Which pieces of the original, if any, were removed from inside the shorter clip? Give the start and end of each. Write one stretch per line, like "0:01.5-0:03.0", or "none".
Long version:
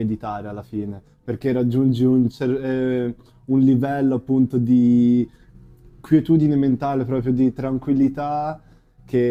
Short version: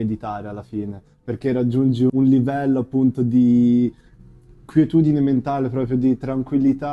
0:02.1-0:03.5